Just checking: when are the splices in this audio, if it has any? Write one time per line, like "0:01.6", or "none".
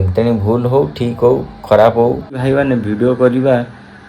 0:02.3